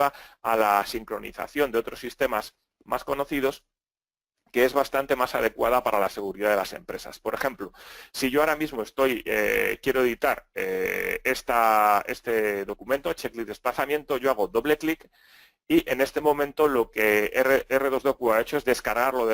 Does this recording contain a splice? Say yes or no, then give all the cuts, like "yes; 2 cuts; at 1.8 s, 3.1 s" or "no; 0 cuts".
yes; 1 cut; at 15.2 s